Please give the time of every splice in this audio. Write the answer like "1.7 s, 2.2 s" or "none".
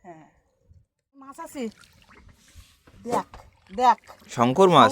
1.3 s